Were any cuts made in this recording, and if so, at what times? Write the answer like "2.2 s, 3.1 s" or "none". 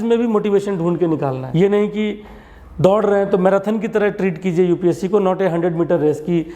1.4 s